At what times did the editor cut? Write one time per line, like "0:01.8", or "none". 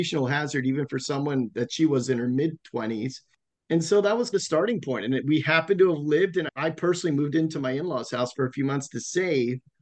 0:03.2